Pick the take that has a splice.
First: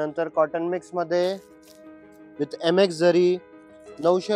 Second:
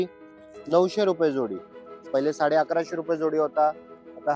second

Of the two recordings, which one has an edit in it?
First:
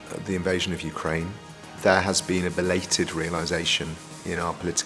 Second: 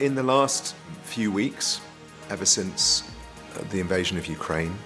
second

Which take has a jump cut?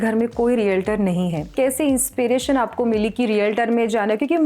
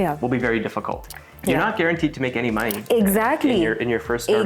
first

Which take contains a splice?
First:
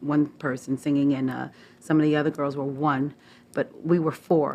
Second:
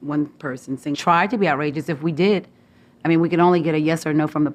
first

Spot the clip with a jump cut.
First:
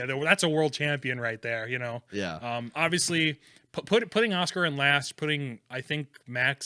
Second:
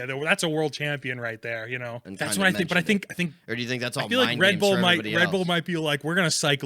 second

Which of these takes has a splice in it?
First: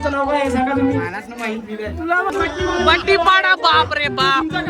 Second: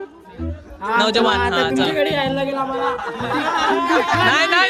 first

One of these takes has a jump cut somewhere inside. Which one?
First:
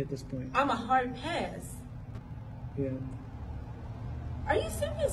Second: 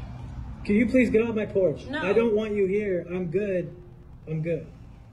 second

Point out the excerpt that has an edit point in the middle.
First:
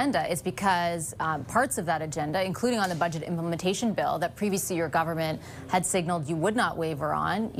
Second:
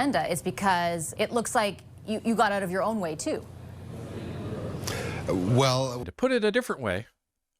second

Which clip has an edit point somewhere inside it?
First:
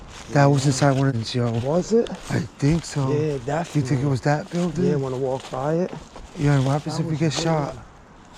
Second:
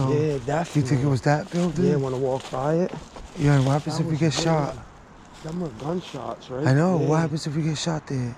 first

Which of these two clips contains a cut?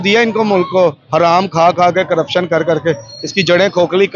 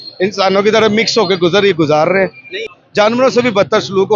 second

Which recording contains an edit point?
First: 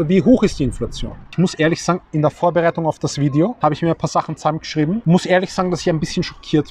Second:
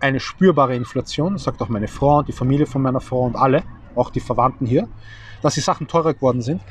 first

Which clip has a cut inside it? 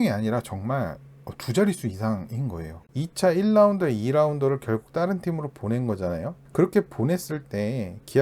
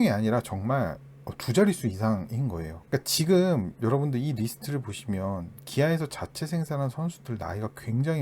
first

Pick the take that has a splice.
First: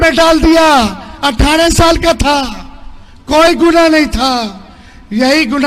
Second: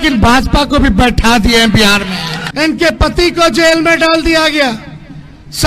second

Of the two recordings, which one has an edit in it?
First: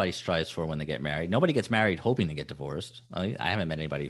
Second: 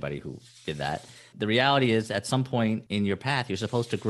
second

